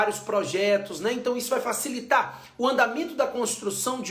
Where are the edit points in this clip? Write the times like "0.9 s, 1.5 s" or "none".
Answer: none